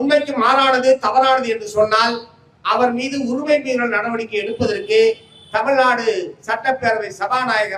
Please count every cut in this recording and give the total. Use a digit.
0